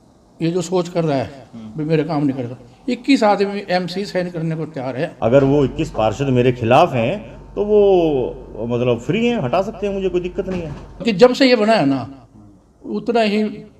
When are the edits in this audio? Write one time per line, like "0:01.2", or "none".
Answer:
0:05.1
0:11.0